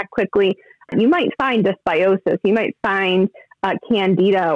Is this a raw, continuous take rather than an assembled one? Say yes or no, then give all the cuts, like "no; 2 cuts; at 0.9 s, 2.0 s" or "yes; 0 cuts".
no; 1 cut; at 0.9 s